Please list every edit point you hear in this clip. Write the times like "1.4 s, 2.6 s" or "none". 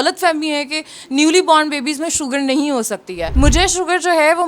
3.2 s